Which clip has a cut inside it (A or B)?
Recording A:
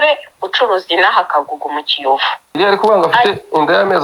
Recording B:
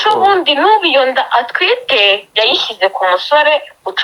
A